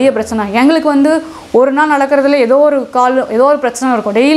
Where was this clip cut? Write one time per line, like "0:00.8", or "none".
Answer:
none